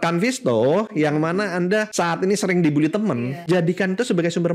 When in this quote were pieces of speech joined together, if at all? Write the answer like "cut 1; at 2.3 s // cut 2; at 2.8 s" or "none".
cut 1; at 1.9 s // cut 2; at 3.3 s